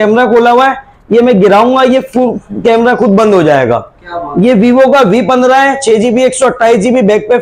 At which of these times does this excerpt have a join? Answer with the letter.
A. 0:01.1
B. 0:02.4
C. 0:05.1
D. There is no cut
D